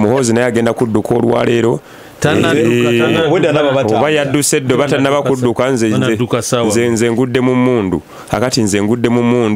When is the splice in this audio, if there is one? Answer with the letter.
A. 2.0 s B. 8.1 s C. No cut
C